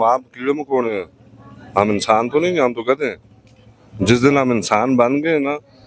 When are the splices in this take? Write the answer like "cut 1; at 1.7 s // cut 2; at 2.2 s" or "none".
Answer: none